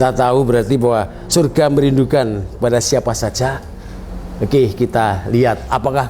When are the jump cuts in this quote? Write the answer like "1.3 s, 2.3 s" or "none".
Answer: 1.2 s